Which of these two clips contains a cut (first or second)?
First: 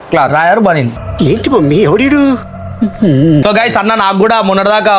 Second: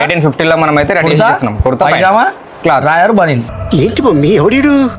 first